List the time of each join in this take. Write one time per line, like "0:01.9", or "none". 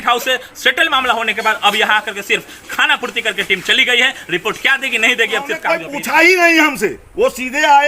0:05.7